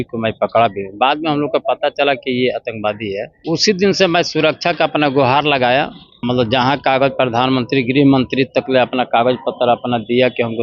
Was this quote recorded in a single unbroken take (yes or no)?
no